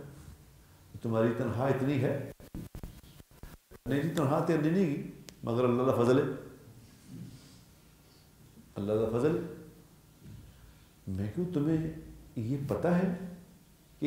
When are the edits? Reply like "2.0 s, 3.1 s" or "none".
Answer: none